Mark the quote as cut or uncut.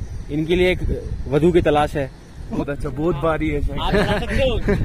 cut